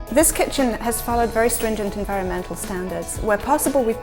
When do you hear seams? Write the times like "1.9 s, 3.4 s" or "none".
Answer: none

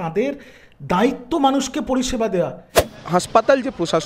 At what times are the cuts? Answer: 2.9 s

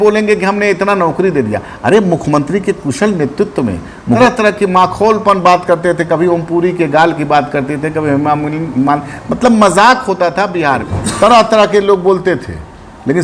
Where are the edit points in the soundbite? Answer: 4.2 s, 11.0 s

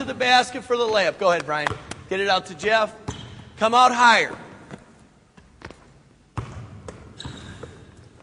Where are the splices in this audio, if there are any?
7.0 s

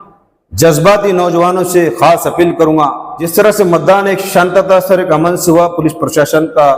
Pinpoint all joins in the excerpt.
3.3 s

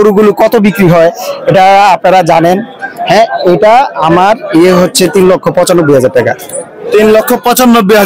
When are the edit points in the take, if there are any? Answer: none

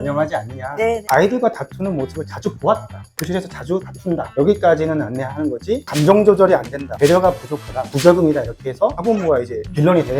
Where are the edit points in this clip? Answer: 1.0 s, 5.9 s, 8.9 s

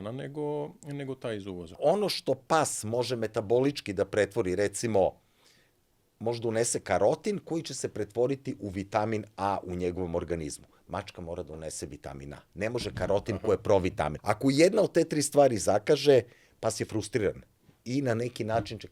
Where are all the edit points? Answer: 1.7 s, 14.2 s

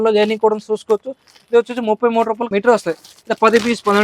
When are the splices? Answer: none

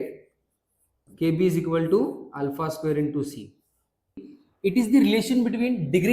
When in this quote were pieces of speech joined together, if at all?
4.2 s

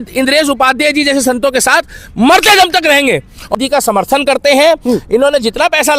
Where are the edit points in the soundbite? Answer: 3.5 s

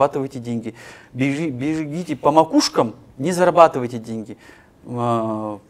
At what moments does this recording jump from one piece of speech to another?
none

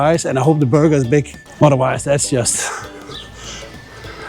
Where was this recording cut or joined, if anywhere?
1.4 s

